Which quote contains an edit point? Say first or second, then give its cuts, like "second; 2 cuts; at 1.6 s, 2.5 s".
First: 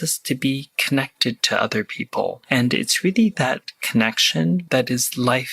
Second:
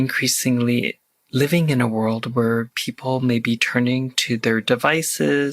first; 2 cuts; at 2.4 s, 4.6 s